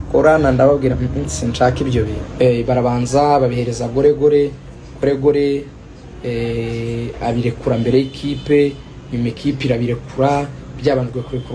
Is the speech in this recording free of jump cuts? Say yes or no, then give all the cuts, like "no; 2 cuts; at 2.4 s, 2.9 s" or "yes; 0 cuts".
no; 1 cut; at 2.2 s